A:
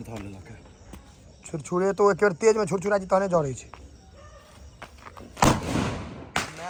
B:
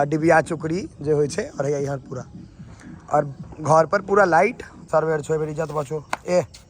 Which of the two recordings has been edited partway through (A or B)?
B